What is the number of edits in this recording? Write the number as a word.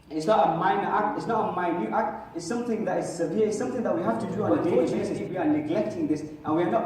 one